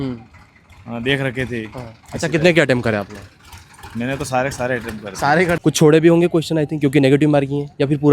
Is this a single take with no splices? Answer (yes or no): no